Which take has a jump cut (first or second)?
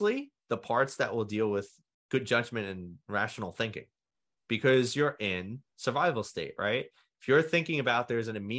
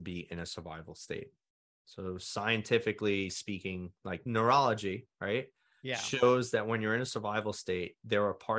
second